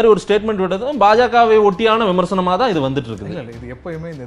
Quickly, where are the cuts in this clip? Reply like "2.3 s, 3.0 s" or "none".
none